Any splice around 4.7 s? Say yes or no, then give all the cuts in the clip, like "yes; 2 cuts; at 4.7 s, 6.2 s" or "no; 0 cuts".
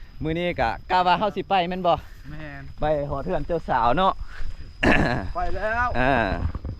no; 0 cuts